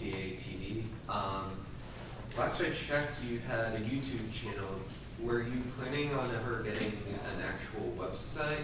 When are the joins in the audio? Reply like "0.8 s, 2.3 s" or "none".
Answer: 2.3 s